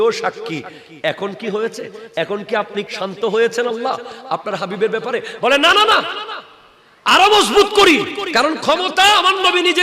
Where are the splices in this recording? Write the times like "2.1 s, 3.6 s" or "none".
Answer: 2.9 s, 8.2 s